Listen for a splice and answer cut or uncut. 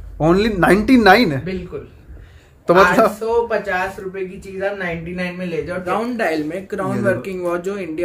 cut